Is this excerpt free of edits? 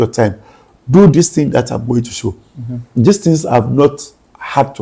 yes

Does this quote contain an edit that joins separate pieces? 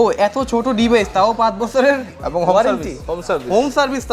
no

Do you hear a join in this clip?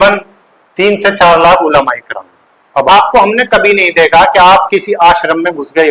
yes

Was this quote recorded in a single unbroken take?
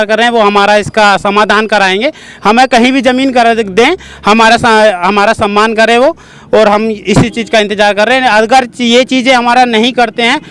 yes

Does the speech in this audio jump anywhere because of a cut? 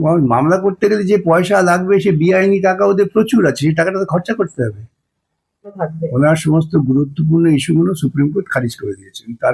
yes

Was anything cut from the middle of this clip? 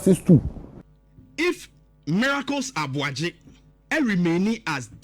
yes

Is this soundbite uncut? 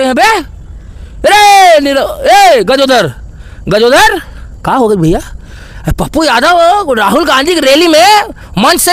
yes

